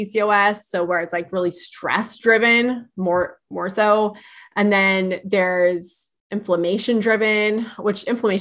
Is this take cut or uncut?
uncut